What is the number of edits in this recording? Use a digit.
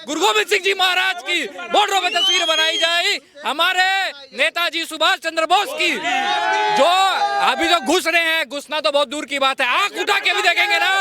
0